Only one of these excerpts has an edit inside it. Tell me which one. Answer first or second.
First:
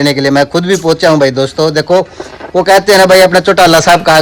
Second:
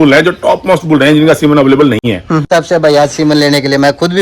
second